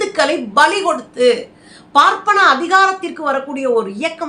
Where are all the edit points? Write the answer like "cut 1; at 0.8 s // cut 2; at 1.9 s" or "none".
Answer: none